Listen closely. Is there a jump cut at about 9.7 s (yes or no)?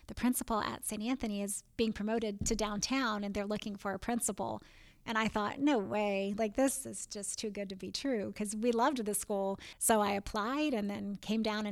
yes